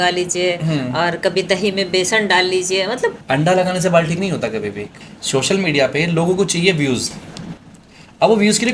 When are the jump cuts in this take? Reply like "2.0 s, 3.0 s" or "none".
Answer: 3.2 s, 4.9 s